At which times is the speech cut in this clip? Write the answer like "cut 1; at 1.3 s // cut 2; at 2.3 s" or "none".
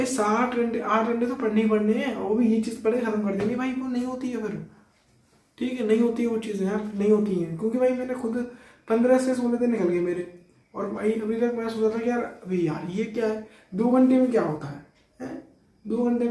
none